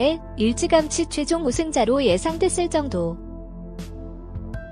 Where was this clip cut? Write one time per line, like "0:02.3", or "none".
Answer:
none